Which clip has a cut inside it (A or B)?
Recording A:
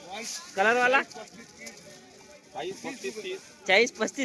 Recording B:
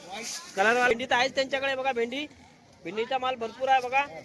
B